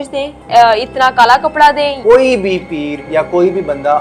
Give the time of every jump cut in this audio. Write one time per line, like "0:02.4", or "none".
0:02.0